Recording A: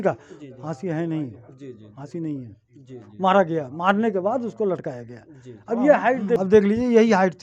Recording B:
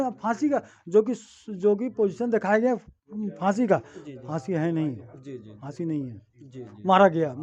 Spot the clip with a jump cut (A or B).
A